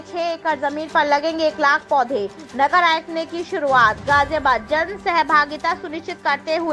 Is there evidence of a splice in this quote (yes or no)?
no